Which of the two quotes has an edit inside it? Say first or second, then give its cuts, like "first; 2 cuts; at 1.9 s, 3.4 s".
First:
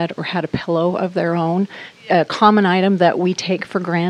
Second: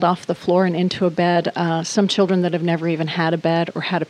first; 1 cut; at 1.9 s